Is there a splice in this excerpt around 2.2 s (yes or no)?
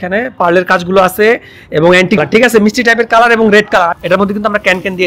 yes